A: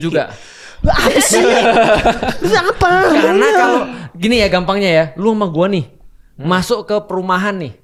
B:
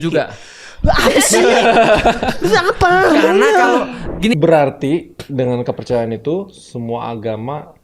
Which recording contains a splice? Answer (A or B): B